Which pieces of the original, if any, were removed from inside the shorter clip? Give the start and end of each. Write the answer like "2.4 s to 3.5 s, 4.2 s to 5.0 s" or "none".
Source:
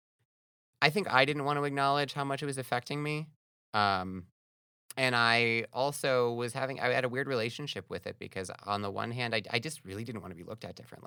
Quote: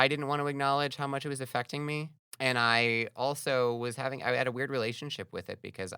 3.4 s to 4.8 s